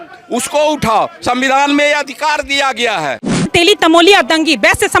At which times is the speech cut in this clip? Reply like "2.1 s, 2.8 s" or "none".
3.5 s